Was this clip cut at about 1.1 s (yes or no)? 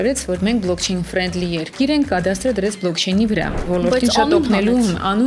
no